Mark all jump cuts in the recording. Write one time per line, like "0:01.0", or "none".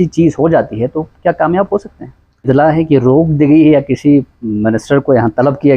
0:02.5